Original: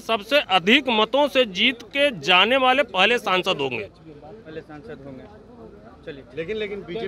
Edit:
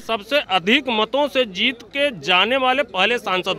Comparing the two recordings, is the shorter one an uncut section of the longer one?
yes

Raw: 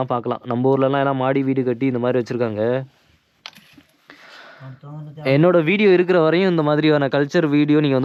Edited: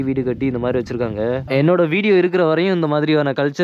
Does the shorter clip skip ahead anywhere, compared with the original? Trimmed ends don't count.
yes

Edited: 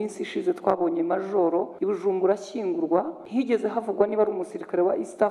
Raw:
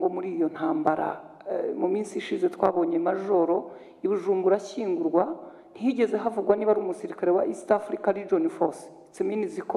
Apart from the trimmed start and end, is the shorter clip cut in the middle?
yes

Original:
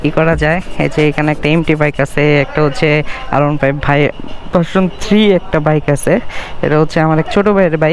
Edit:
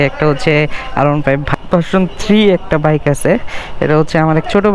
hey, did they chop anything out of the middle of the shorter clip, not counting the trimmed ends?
yes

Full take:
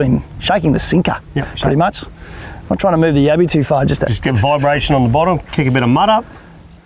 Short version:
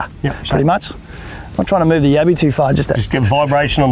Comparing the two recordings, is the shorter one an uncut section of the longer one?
yes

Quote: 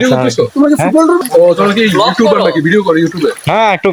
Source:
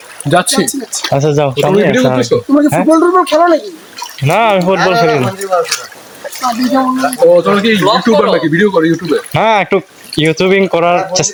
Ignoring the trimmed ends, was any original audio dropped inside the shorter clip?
yes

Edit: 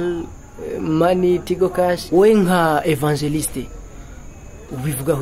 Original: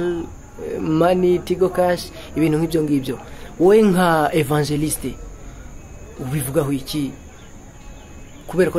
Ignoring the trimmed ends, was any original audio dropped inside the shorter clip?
yes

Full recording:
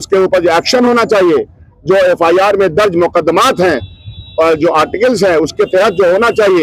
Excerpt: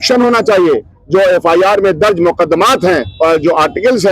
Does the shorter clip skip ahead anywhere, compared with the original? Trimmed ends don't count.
yes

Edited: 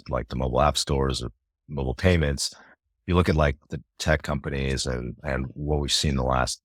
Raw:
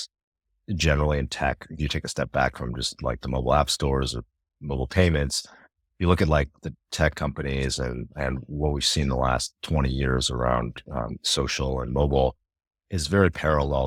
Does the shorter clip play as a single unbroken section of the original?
yes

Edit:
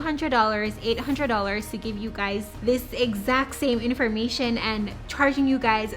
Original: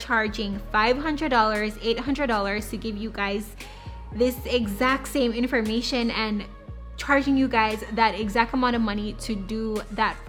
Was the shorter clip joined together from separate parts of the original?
yes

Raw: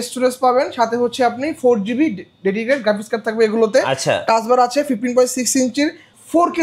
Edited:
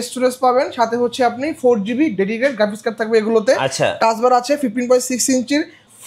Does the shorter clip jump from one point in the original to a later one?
yes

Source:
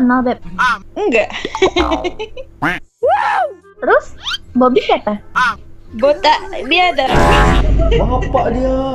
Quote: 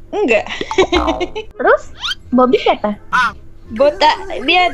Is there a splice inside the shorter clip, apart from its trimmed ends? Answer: yes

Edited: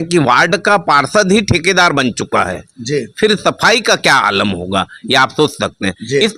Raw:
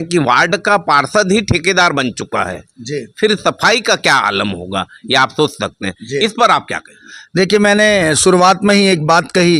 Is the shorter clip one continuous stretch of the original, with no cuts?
yes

